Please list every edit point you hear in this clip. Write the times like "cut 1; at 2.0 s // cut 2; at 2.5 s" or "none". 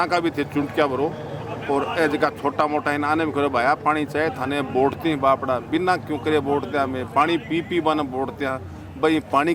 none